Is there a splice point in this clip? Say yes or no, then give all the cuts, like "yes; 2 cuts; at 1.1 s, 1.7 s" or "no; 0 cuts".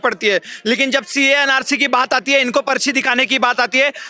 no; 0 cuts